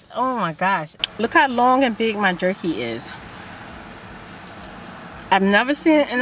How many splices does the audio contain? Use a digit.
1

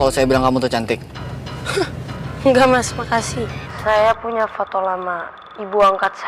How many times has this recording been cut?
1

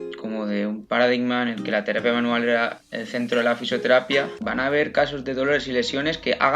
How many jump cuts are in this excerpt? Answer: 1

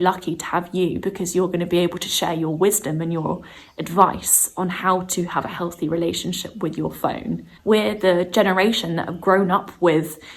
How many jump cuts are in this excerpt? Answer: 1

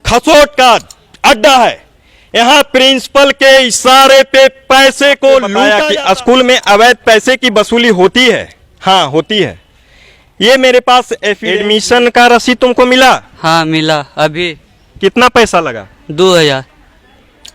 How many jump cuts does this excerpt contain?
2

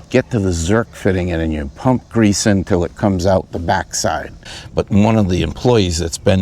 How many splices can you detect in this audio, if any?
1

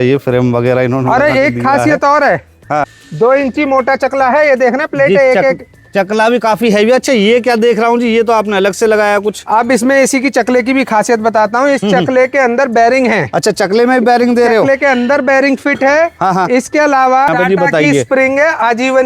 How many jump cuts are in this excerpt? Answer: 2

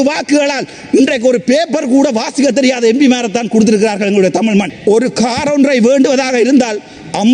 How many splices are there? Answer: 1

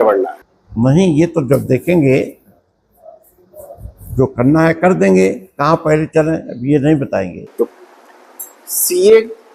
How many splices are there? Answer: 1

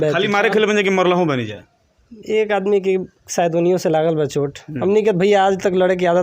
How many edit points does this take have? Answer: 0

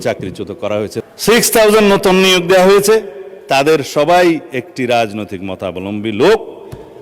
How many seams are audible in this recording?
1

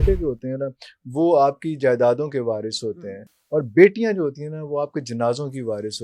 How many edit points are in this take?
0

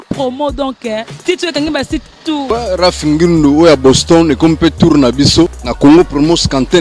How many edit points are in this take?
2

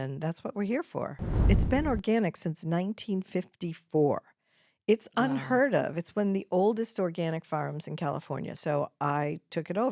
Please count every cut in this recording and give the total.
2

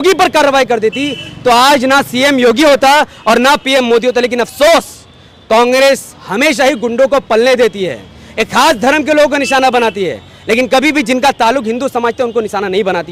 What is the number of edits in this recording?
0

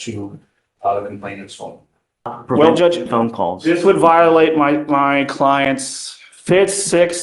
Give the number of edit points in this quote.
1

